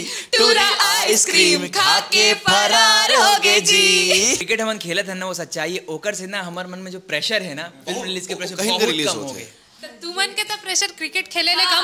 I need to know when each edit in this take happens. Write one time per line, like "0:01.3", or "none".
0:04.4

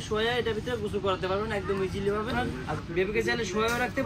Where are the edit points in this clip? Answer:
0:02.3

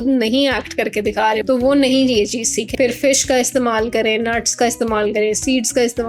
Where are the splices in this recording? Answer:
0:01.4
0:02.6

